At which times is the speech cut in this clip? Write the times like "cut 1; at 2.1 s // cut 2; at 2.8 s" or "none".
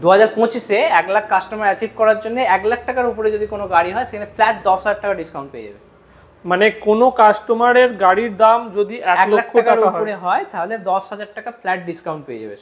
none